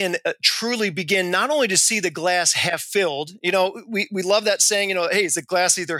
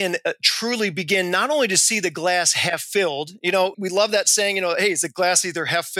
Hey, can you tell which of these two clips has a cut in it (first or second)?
second